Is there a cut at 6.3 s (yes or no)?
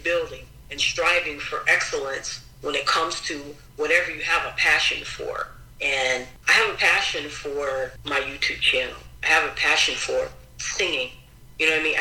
yes